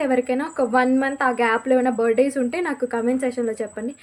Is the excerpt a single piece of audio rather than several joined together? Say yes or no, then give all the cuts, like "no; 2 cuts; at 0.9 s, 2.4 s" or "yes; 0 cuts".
yes; 0 cuts